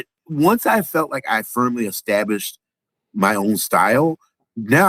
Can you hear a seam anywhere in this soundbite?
no; 0 cuts

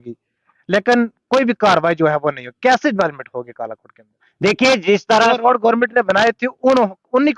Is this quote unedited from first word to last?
yes; 0 cuts

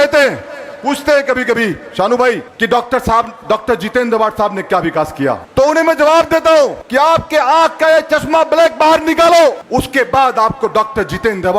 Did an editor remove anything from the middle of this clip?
yes; 4 cuts; at 2.5 s, 5.4 s, 6.8 s, 9.6 s

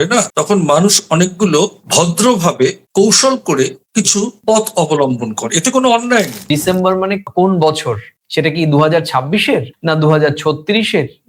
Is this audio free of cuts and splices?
no; 1 cut; at 6.5 s

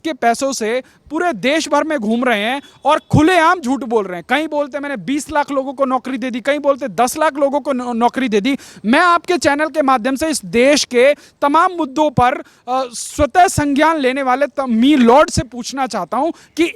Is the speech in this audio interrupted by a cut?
no; 0 cuts

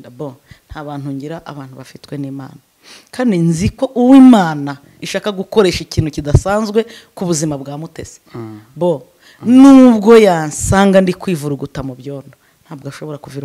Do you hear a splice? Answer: no; 0 cuts

